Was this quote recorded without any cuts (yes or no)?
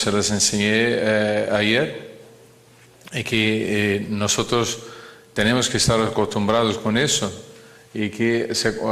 no